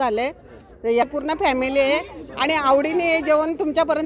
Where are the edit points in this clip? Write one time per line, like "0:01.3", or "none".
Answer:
0:01.0

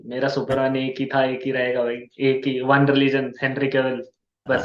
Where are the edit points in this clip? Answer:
none

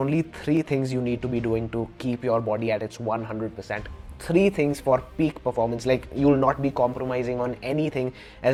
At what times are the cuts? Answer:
none

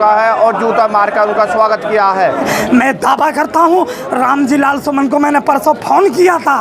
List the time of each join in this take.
0:02.5

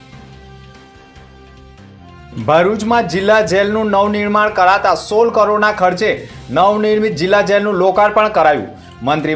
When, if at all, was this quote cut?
0:01.1

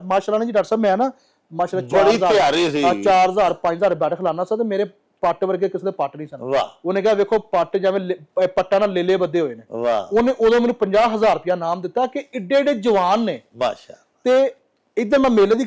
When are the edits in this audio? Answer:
none

